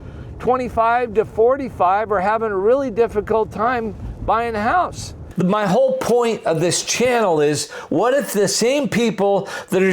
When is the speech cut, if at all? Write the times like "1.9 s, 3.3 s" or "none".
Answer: 5.2 s